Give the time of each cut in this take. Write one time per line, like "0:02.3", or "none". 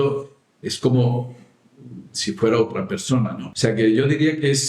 0:03.4